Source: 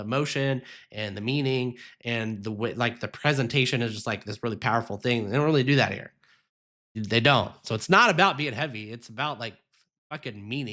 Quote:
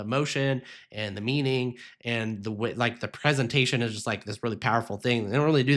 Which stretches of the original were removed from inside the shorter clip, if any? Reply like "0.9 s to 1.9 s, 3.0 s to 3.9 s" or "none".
none